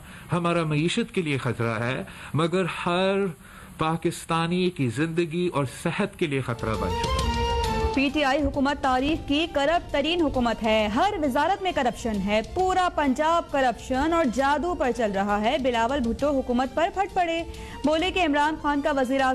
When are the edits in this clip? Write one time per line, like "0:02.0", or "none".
none